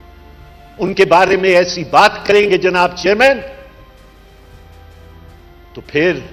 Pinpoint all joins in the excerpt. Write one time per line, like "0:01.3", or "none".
none